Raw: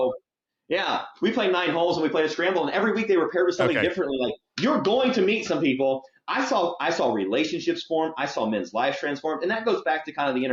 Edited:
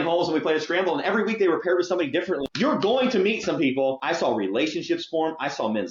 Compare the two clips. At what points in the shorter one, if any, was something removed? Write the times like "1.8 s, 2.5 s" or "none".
2.5 s, 4.0 s